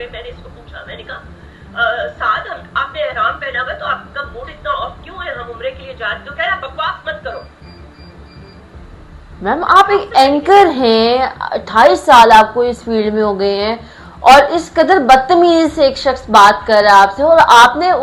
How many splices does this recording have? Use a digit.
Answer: 0